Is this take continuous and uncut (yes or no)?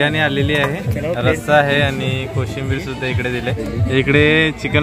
no